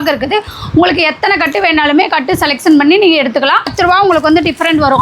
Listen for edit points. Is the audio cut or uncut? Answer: cut